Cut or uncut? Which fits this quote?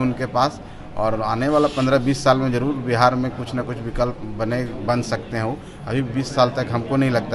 uncut